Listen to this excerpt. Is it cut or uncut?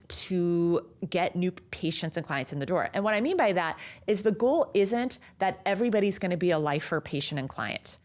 uncut